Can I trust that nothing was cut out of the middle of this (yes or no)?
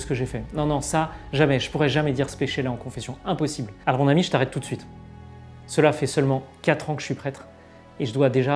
yes